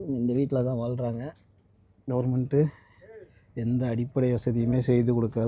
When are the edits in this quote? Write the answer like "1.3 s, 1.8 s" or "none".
none